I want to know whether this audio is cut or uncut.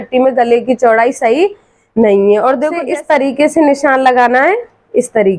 cut